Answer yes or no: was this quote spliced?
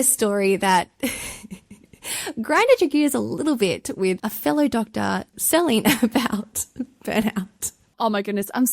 no